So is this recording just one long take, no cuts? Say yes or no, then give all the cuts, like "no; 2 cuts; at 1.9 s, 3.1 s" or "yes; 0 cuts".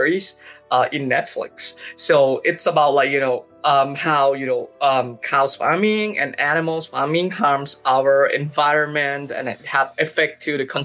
yes; 0 cuts